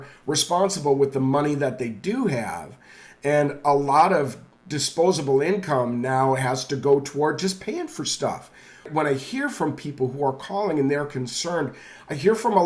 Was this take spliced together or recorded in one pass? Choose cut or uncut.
cut